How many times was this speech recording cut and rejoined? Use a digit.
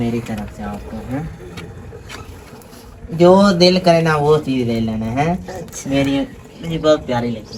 0